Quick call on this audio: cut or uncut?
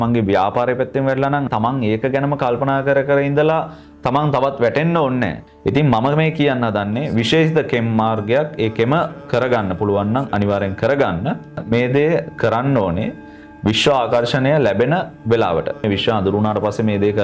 cut